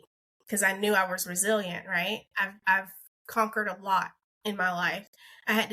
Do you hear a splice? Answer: yes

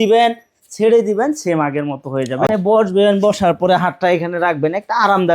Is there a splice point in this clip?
yes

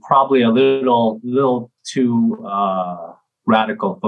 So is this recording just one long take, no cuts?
yes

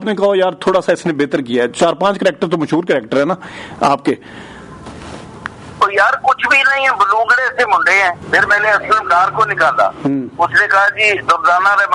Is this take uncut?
no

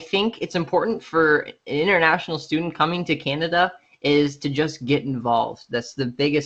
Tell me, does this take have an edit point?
no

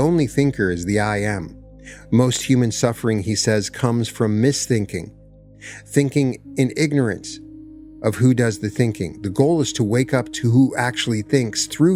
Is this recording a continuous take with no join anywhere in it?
yes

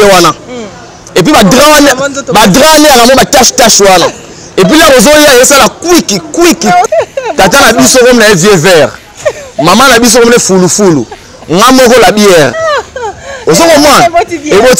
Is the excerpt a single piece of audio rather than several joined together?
no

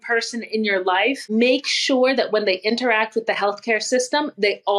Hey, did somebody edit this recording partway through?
yes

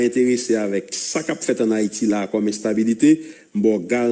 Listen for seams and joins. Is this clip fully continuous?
yes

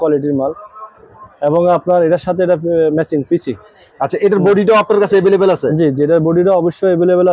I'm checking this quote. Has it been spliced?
no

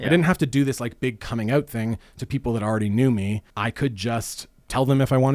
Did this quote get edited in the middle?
yes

